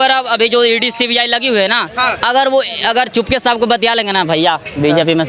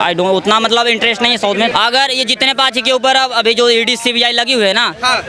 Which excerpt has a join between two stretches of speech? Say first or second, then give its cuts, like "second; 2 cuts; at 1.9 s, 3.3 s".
second; 1 cut; at 1.7 s